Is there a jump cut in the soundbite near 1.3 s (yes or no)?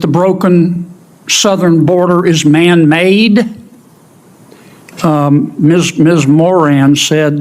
no